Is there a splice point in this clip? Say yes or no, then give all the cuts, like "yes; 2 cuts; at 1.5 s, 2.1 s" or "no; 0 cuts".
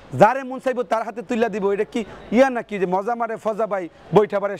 no; 0 cuts